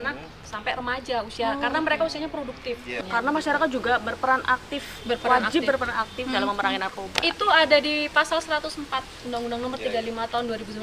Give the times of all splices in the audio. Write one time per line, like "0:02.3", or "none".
0:03.0